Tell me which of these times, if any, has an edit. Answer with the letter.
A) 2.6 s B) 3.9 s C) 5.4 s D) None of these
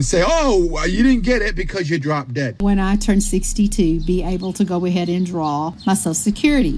A